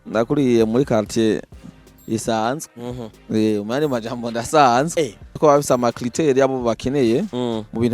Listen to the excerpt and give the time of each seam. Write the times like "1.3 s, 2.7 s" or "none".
5.3 s